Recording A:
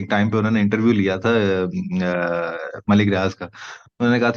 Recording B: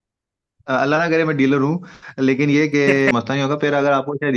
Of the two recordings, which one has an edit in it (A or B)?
B